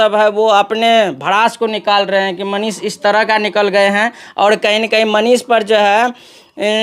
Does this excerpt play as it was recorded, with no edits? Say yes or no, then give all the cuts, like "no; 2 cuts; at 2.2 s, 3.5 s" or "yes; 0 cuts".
yes; 0 cuts